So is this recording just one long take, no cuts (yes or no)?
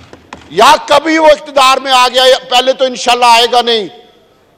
yes